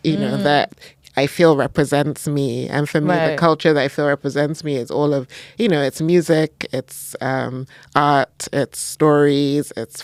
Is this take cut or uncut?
uncut